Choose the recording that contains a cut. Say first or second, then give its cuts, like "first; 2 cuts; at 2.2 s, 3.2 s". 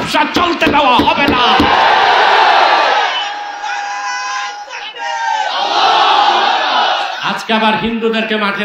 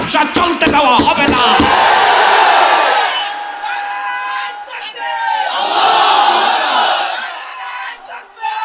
first; 1 cut; at 7.3 s